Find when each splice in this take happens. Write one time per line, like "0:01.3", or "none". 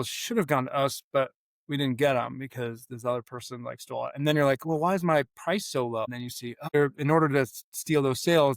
0:06.7